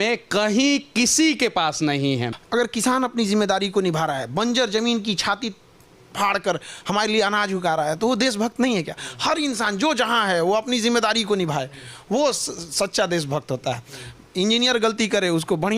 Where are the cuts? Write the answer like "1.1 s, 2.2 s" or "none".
2.4 s